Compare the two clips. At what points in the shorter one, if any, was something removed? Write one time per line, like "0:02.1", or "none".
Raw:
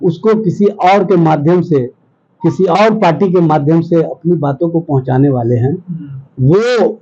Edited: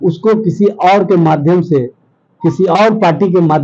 none